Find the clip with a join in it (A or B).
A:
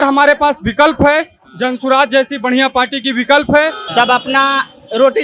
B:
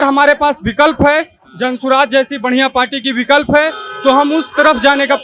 A